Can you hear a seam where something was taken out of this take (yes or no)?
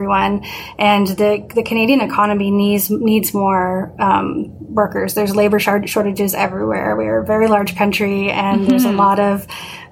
no